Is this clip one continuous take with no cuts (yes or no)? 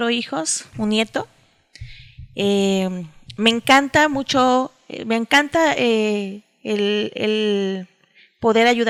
yes